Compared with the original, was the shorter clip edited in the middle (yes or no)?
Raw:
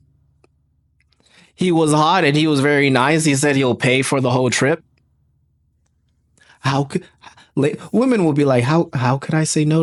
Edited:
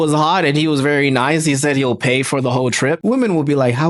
yes